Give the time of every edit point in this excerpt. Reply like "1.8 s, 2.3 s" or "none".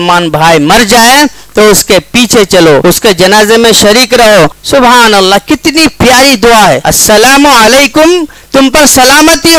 2.8 s, 4.6 s, 6.9 s